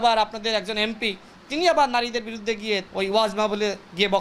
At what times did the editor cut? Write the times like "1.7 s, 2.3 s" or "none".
2.9 s

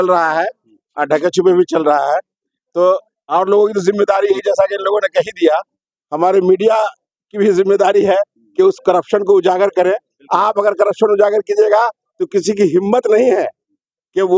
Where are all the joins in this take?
none

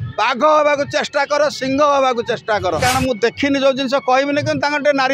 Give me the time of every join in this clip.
2.8 s

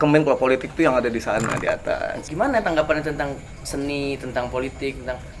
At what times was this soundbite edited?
2.2 s

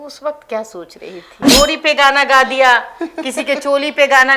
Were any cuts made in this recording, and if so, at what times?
1.4 s

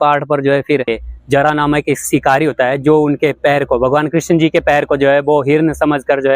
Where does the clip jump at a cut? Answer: 1.0 s

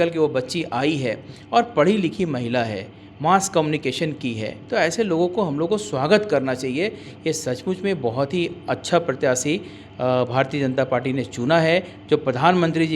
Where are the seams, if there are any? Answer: none

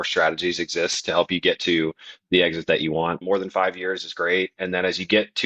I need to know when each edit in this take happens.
3.2 s

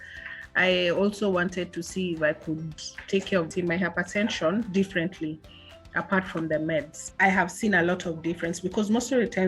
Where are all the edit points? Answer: 3.5 s, 7.0 s

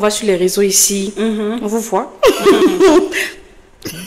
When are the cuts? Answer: none

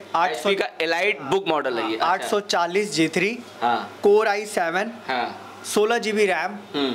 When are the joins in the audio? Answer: none

